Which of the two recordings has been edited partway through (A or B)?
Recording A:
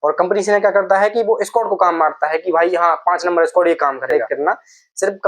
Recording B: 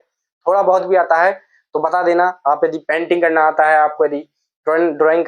A